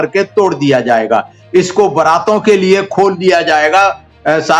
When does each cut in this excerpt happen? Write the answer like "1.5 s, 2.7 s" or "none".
none